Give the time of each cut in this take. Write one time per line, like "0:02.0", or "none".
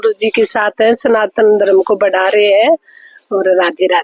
none